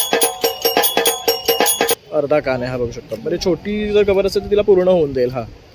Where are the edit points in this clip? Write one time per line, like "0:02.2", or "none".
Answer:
0:02.0

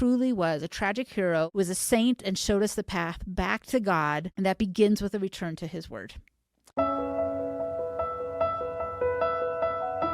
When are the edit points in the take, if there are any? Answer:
0:01.5
0:04.3
0:06.6

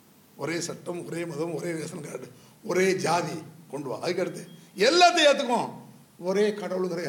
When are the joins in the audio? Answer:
none

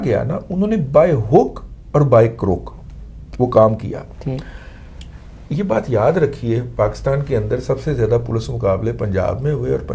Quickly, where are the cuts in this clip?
none

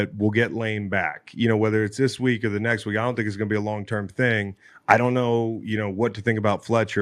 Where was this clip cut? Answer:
none

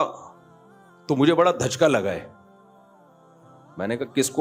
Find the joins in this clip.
none

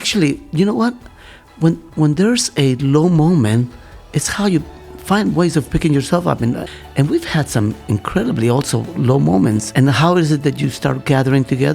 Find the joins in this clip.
0:06.6
0:09.7

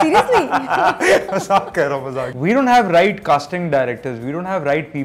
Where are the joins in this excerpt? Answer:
0:02.3

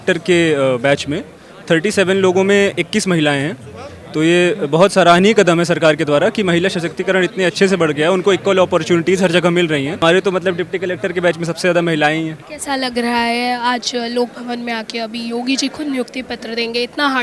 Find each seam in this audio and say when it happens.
none

